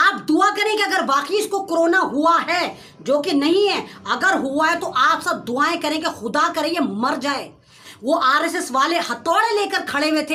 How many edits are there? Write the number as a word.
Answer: one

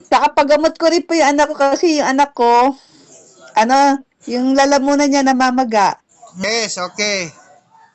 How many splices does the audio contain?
one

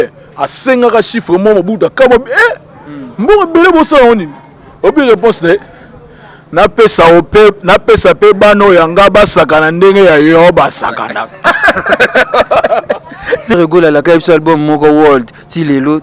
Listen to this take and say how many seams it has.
one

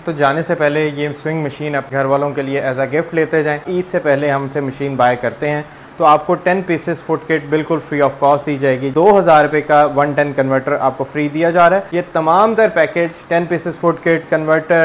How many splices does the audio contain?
four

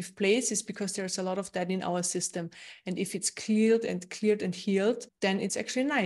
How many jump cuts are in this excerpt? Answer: one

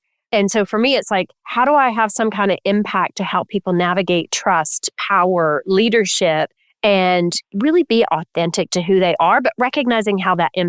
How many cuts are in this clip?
one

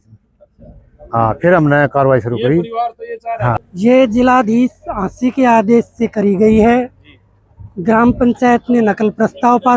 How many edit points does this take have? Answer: one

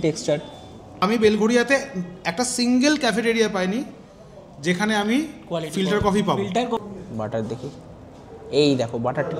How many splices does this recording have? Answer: two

